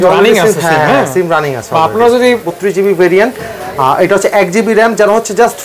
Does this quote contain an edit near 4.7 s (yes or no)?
no